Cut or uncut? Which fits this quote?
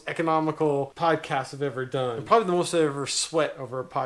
cut